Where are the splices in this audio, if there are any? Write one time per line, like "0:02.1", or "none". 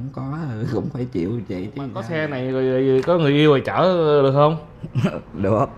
0:02.1